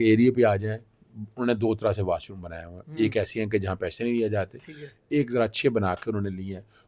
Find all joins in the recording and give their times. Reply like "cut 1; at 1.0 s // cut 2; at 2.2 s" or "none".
none